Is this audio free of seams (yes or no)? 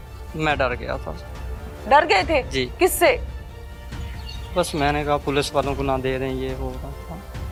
yes